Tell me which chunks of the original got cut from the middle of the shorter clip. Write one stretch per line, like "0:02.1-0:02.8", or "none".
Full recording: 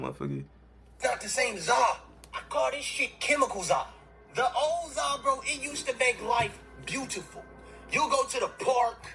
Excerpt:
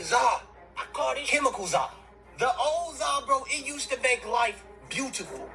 0:02.8-0:03.2